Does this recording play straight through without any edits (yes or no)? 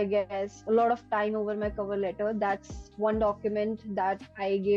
yes